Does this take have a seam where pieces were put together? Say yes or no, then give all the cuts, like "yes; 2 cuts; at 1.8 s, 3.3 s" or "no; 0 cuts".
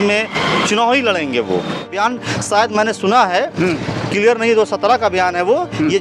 yes; 1 cut; at 1.9 s